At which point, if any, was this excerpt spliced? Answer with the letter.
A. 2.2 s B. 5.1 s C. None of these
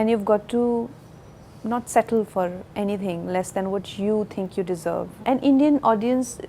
B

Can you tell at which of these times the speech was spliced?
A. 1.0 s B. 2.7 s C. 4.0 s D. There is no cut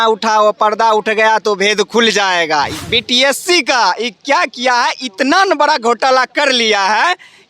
B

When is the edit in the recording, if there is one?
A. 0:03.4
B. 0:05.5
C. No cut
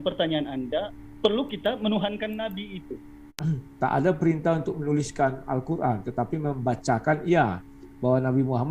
A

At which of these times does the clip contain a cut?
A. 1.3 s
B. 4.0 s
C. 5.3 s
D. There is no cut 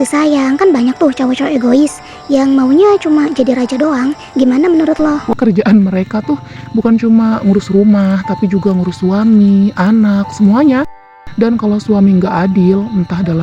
C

